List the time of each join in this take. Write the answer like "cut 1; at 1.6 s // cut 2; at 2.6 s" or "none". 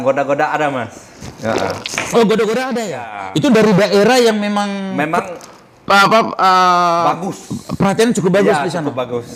none